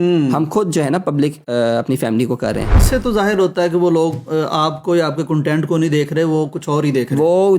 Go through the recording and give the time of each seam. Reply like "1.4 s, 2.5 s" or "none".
2.8 s

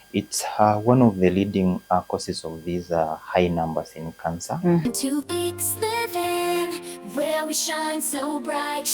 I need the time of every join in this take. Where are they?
4.8 s

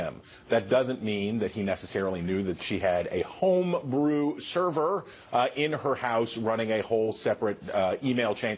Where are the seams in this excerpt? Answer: 6.1 s

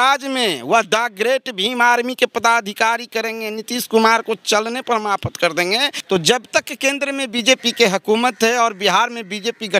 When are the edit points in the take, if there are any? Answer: 5.9 s

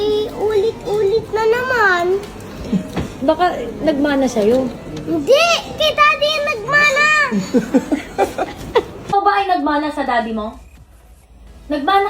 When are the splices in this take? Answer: 9.1 s

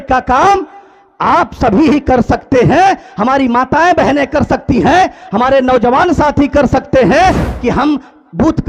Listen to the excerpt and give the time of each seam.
7.5 s

